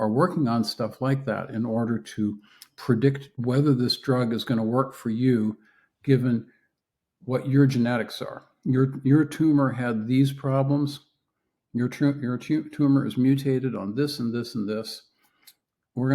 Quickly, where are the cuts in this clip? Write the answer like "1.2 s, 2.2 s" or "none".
3.3 s